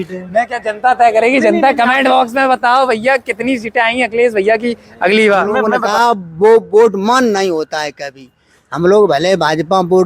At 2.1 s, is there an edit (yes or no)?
no